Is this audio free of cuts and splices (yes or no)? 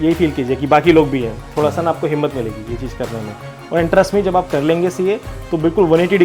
yes